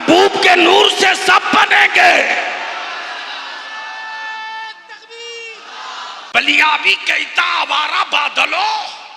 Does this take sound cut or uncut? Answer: cut